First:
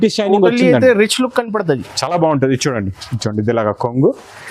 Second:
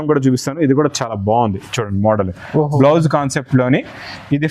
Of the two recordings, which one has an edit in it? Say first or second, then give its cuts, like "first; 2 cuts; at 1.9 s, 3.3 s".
first; 1 cut; at 3.1 s